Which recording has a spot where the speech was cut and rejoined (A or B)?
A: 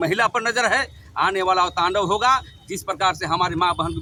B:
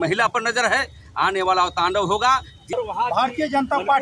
B